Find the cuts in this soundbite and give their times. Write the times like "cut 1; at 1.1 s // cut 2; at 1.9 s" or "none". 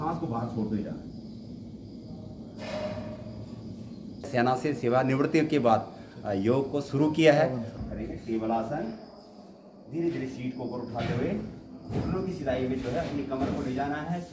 cut 1; at 4.3 s // cut 2; at 7.5 s